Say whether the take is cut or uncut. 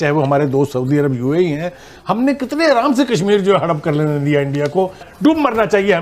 cut